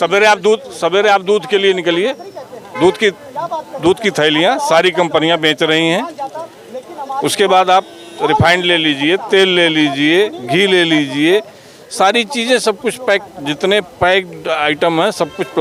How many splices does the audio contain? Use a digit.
0